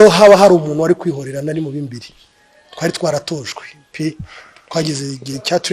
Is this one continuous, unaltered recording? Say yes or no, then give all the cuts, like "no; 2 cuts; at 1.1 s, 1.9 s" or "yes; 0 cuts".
yes; 0 cuts